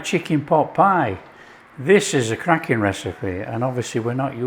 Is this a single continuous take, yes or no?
yes